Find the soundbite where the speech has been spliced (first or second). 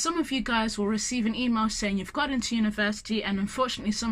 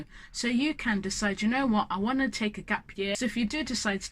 second